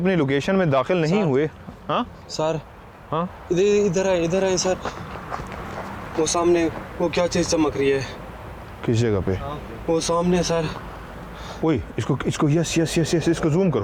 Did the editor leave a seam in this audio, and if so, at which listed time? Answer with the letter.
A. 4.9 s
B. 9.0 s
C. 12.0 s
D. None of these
D